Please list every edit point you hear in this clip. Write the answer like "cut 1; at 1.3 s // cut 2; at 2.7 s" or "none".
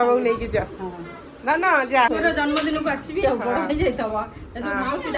cut 1; at 2.1 s